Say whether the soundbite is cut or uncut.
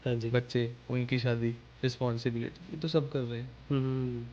uncut